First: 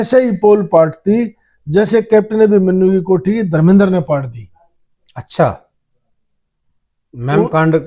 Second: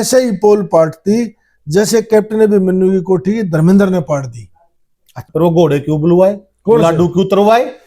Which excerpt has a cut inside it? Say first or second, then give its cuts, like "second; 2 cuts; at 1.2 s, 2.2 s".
second; 1 cut; at 5.2 s